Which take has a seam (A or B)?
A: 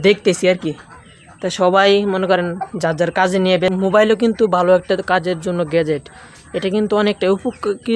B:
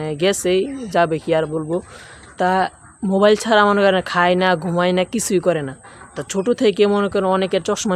A